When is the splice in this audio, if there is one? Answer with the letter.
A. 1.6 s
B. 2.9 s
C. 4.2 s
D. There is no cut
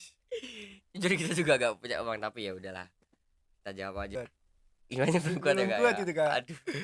C